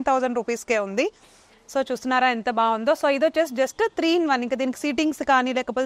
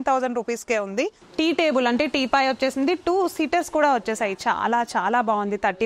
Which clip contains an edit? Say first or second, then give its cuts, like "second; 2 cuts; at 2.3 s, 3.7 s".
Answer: second; 1 cut; at 1.2 s